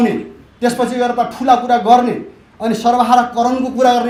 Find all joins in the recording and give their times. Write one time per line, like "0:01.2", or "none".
none